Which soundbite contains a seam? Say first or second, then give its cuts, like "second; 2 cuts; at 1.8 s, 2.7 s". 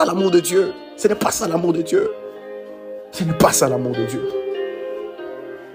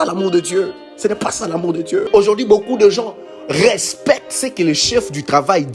second; 1 cut; at 2.1 s